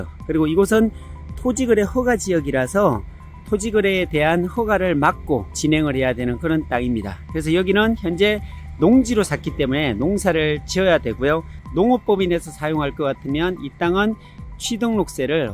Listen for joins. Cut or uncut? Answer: uncut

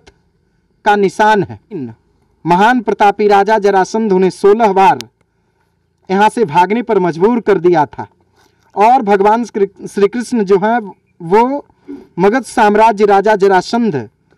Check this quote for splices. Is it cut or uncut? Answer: cut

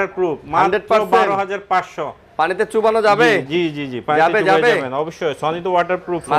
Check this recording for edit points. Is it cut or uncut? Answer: uncut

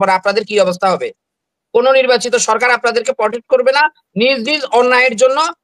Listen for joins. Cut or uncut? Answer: uncut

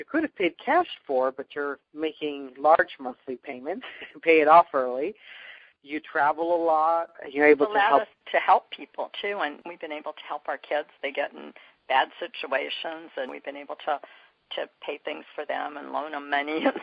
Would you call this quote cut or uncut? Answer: uncut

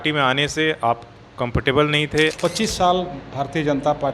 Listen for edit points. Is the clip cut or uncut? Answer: cut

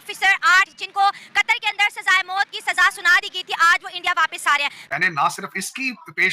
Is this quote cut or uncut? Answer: cut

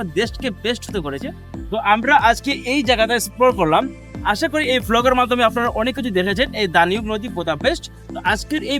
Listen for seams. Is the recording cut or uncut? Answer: uncut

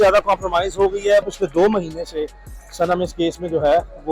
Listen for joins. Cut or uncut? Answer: cut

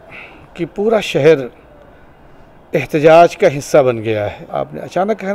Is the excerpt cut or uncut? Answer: cut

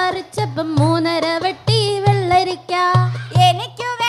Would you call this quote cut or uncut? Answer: uncut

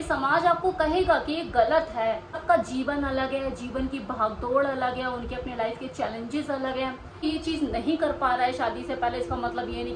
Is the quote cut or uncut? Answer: cut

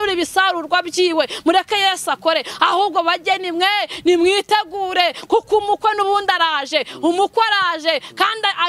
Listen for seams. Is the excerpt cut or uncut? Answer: uncut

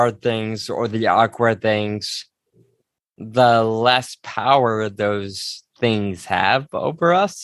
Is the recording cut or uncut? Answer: uncut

